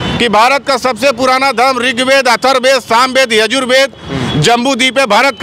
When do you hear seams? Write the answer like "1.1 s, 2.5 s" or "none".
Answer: none